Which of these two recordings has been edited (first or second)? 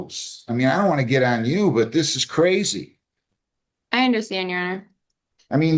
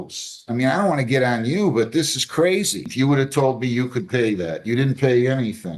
second